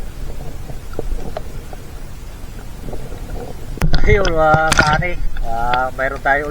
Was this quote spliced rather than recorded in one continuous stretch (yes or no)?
yes